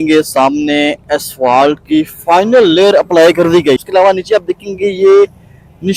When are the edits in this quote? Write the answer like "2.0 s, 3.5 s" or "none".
3.8 s